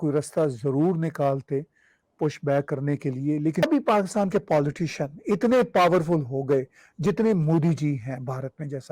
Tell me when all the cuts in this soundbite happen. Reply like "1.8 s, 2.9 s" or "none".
3.6 s